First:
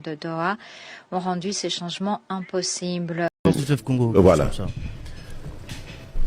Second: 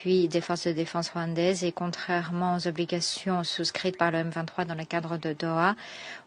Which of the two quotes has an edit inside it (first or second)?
first